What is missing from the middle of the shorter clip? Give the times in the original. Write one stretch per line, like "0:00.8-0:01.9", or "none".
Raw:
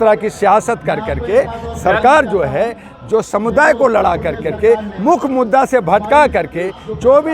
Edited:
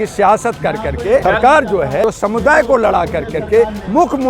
0:01.5-0:01.8
0:02.6-0:03.1

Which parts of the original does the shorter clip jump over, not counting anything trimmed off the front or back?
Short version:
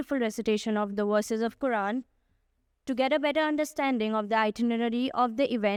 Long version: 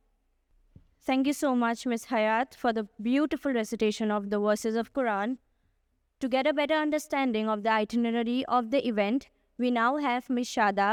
none

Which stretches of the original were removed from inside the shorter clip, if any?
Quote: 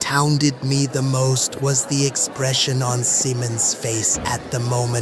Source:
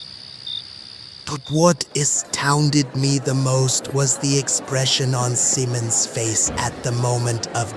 none

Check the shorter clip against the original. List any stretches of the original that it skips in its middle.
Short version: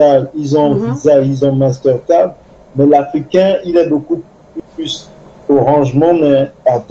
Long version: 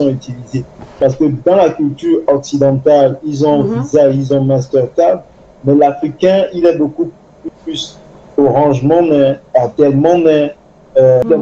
none

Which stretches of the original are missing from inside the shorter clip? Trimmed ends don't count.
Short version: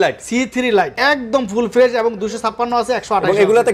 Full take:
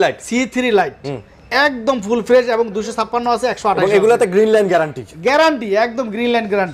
0:00.9-0:01.5

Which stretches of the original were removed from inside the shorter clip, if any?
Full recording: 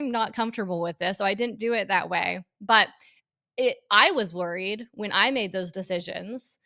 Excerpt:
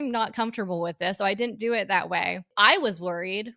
0:02.5-0:03.8

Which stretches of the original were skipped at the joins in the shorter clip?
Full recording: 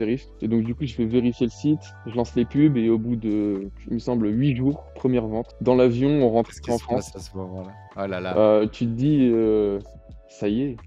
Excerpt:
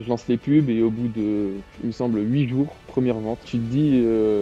0:05.5-0:08.7

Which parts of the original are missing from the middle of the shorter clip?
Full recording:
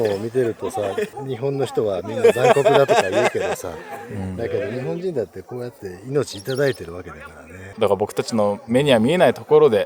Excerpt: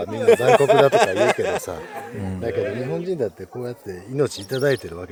none

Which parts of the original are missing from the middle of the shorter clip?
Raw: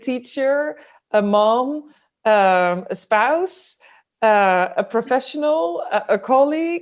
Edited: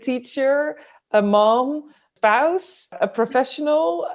0:02.0-0:02.9
0:03.8-0:04.7

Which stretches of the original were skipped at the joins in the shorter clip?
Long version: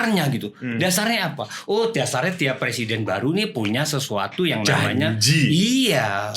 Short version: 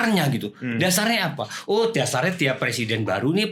none

